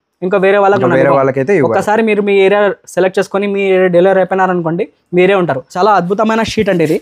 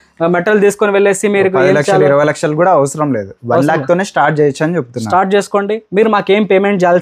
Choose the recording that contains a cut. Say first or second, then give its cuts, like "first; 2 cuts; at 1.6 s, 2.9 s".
first; 1 cut; at 5.6 s